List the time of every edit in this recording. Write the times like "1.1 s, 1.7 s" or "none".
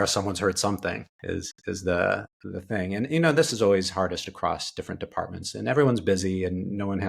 none